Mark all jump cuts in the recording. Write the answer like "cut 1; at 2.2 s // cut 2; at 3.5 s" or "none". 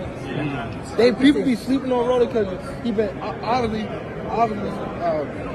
none